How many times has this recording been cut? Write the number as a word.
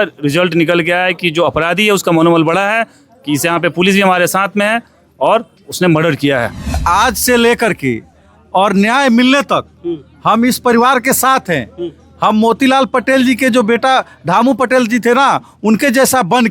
one